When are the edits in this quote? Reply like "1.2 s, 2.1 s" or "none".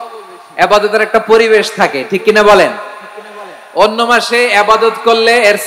none